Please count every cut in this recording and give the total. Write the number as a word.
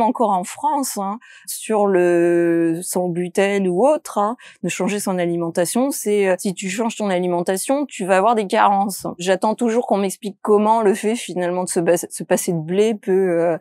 three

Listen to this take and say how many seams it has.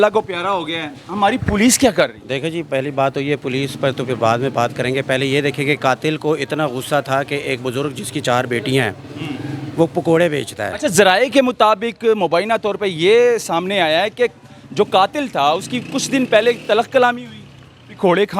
zero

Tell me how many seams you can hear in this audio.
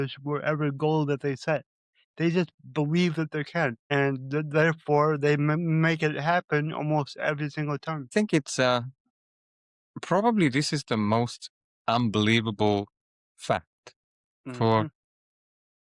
two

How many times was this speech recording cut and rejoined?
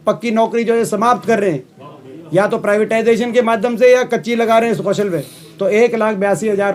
zero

